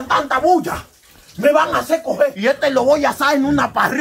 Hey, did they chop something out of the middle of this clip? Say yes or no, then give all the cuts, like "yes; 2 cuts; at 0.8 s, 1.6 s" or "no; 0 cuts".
yes; 1 cut; at 2.7 s